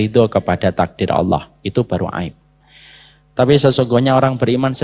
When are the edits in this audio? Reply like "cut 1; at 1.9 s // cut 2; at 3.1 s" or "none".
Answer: none